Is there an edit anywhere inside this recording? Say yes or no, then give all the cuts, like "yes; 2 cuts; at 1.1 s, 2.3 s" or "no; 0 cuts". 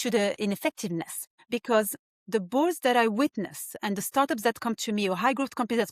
yes; 1 cut; at 1.5 s